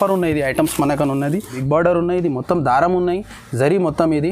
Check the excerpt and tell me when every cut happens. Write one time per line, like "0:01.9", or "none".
0:01.6